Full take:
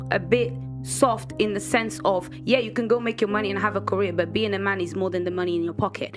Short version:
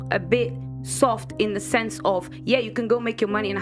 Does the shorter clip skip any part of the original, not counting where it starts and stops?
no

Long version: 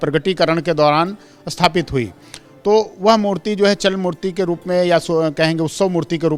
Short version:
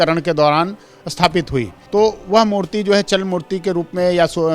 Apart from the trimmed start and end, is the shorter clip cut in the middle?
yes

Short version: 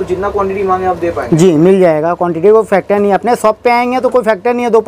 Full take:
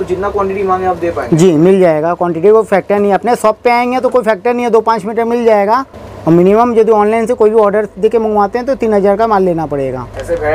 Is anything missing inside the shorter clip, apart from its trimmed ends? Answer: no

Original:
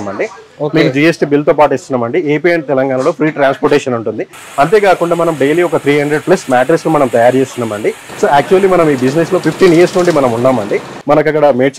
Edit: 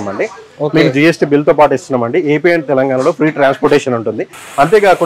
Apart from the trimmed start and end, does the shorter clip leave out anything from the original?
no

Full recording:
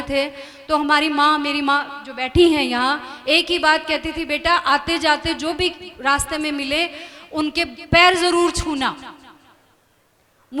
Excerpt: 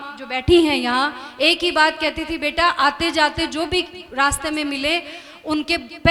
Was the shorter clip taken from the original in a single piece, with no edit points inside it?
yes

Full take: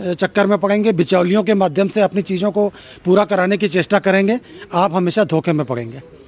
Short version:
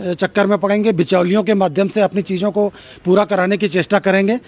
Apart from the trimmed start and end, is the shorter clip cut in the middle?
no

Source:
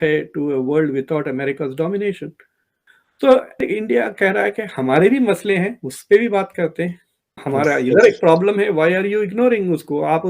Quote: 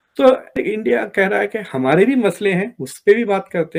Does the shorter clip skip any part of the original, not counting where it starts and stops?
no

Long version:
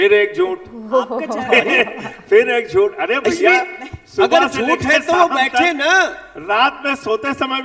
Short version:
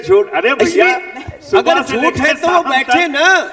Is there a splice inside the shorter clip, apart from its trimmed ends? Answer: no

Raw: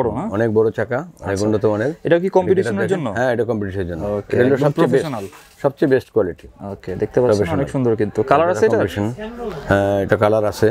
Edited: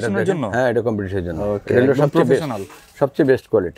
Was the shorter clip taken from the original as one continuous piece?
yes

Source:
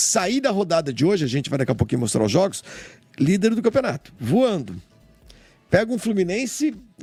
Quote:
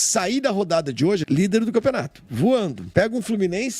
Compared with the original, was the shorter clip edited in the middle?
yes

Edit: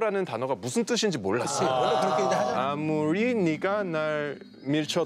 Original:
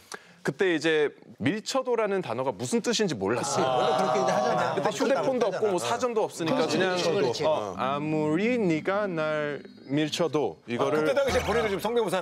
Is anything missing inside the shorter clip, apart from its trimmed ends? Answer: yes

